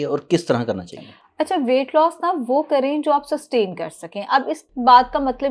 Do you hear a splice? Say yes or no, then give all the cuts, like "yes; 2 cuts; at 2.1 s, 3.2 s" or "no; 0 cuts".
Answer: no; 0 cuts